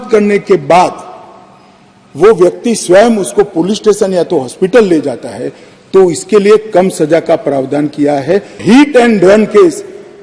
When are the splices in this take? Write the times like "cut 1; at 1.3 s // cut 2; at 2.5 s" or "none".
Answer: cut 1; at 8.6 s